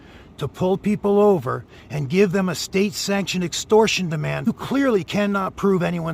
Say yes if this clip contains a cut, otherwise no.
yes